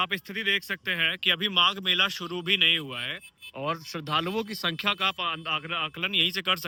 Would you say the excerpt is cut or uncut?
uncut